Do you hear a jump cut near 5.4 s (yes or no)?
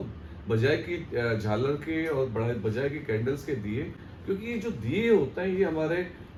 no